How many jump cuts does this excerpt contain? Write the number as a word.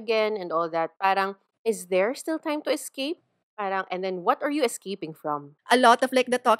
two